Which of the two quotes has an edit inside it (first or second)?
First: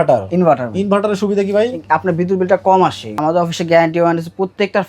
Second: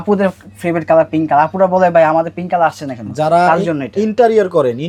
first